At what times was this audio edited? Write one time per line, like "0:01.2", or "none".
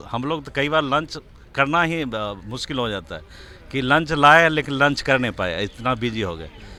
none